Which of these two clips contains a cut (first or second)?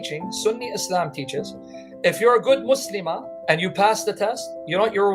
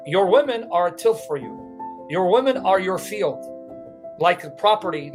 first